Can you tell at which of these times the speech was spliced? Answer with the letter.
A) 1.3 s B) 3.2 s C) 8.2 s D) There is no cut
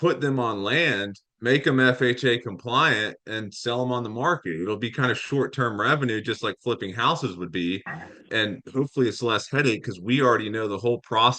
C